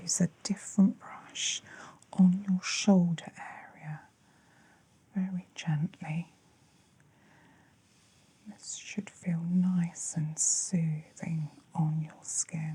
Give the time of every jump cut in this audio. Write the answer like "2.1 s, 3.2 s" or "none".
none